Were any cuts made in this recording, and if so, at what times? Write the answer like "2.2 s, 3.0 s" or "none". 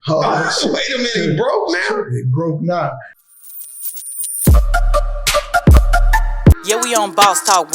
3.1 s